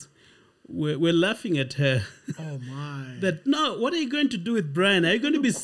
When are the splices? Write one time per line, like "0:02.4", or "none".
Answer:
none